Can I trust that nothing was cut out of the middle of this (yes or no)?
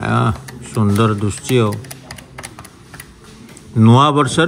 yes